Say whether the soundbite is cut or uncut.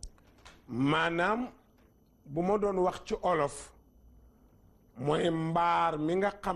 cut